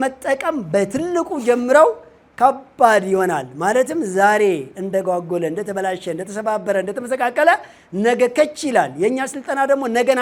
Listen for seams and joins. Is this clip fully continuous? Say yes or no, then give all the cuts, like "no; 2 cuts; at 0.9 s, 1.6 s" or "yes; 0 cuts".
yes; 0 cuts